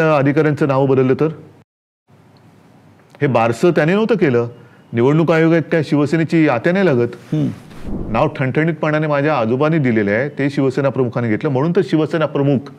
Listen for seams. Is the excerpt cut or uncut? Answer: cut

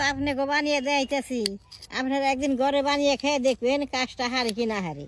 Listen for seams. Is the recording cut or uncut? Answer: uncut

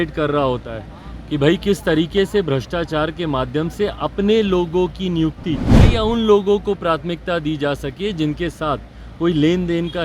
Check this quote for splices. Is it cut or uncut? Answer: cut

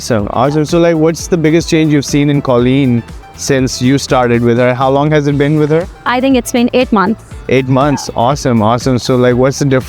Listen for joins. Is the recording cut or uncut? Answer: uncut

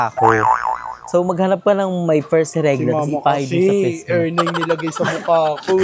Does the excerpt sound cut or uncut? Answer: uncut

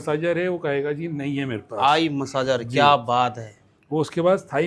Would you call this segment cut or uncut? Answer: uncut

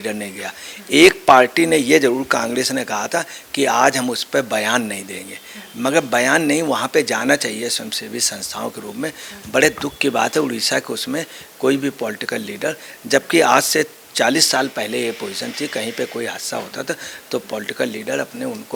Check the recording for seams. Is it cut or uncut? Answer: uncut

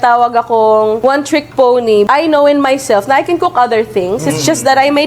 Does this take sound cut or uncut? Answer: cut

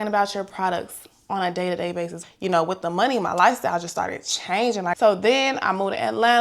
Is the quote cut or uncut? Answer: cut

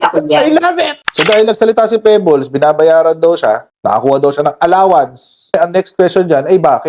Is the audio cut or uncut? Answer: cut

